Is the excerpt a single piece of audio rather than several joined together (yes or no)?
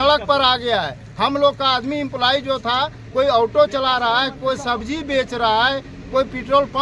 yes